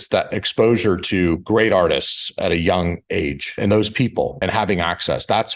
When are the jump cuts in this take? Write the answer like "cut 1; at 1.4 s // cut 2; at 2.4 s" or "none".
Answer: none